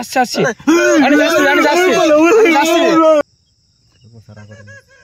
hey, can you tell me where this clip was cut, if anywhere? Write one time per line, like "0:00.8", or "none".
0:03.2